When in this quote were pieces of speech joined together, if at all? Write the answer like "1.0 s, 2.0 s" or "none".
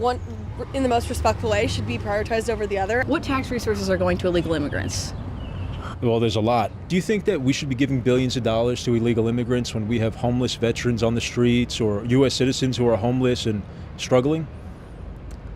3.0 s, 6.8 s